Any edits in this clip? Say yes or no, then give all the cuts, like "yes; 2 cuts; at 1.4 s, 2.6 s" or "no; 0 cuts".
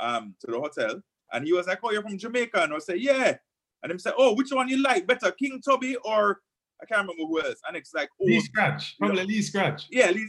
no; 0 cuts